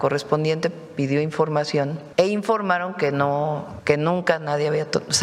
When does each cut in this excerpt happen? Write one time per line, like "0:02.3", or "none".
0:02.0
0:03.7